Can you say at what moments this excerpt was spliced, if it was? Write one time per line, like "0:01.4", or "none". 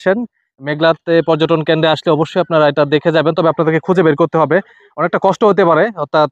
none